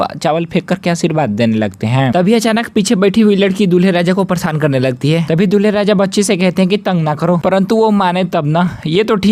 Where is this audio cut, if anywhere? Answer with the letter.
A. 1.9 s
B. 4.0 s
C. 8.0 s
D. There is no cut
D